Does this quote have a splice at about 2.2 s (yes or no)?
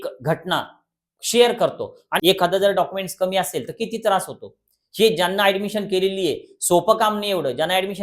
yes